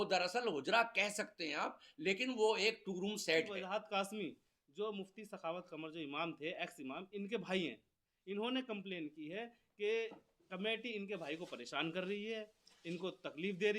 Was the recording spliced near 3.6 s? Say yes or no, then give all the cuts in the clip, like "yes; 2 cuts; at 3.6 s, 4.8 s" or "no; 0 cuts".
yes; 1 cut; at 3.6 s